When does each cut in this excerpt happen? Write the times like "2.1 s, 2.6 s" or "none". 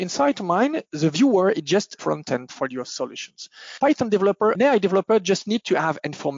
0.9 s, 2.2 s, 3.6 s, 4.5 s